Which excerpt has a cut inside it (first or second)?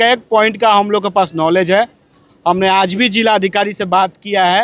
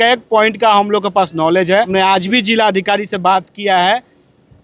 second